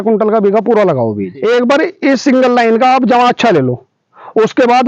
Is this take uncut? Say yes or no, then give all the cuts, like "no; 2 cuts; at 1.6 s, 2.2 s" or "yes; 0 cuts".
no; 1 cut; at 1.3 s